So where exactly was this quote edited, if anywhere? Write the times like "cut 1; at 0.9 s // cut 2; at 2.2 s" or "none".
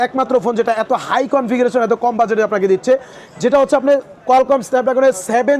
none

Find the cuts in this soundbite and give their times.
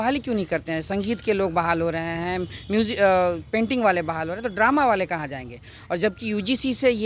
none

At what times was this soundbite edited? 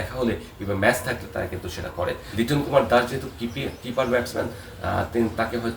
cut 1; at 2.2 s

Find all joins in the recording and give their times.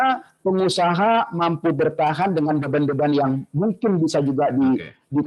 none

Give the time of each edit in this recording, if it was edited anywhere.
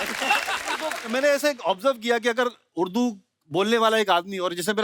cut 1; at 0.9 s

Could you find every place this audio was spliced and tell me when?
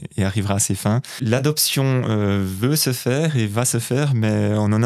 cut 1; at 1.1 s

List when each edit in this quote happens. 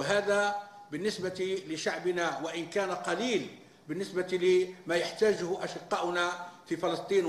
cut 1; at 2.7 s

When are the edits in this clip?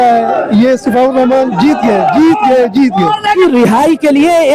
cut 1; at 3.3 s

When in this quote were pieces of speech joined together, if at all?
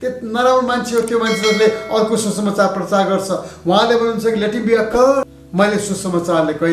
cut 1; at 5.4 s

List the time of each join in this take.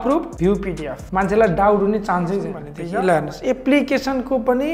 cut 1; at 2.6 s

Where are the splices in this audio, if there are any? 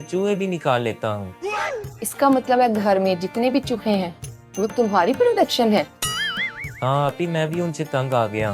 none

